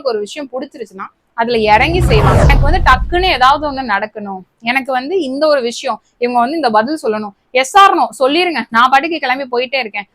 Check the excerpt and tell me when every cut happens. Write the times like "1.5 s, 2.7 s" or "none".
2.5 s

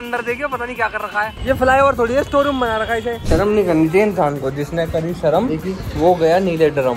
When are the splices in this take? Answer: 1.4 s, 3.2 s

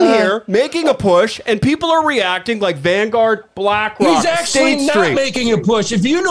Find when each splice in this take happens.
none

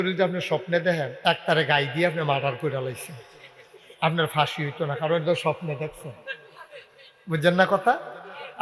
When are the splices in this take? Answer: 1.1 s

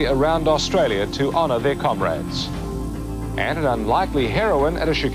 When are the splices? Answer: none

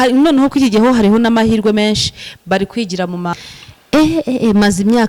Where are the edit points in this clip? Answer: 3.3 s

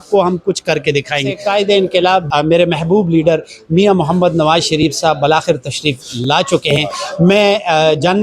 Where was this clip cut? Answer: 1.3 s, 2.3 s

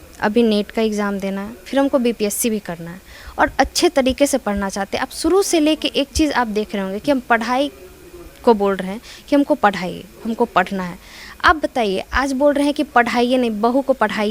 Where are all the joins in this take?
none

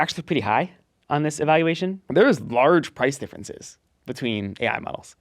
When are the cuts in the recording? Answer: 2.0 s

